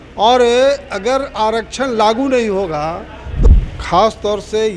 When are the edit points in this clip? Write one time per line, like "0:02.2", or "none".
0:03.4